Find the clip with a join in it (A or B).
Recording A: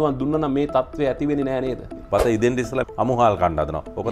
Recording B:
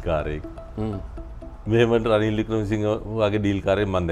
A